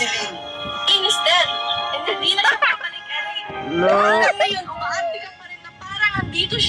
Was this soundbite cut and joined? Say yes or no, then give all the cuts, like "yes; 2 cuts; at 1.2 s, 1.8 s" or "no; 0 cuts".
no; 0 cuts